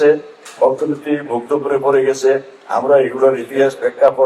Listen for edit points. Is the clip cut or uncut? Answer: uncut